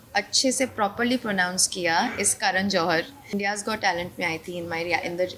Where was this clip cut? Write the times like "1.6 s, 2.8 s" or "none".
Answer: 3.3 s